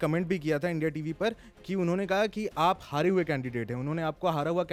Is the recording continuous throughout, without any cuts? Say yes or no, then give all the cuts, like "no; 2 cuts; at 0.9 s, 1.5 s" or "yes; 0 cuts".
yes; 0 cuts